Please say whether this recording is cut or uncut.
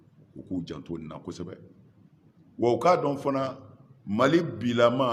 uncut